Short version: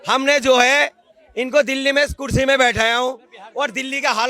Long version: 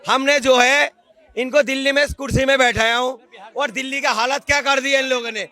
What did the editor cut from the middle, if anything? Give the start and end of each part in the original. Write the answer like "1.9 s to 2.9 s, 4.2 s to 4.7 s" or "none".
none